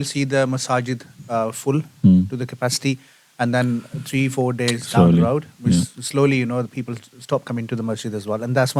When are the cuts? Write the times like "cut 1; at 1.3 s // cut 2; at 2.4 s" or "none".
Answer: none